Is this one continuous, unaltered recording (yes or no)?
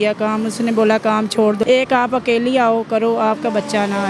no